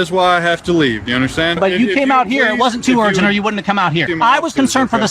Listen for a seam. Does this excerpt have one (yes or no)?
yes